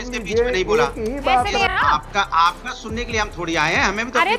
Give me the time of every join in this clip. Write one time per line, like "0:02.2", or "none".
0:01.7